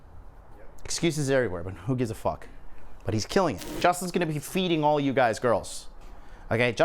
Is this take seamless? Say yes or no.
no